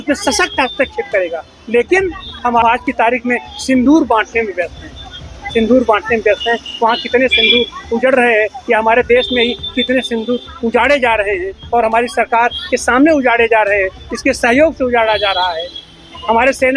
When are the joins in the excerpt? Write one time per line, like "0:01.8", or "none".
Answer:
none